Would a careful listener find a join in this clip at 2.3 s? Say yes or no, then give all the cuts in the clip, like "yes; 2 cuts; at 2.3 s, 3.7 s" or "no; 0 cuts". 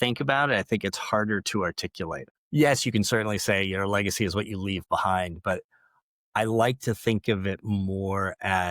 yes; 1 cut; at 2.3 s